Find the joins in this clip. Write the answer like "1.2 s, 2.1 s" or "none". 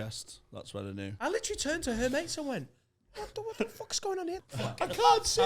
1.1 s, 4.4 s